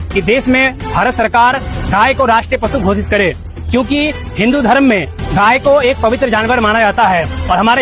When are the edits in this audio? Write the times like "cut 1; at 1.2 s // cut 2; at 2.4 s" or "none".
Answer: none